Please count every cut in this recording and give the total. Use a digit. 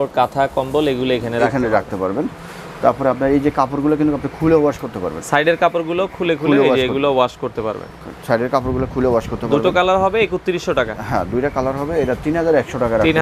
0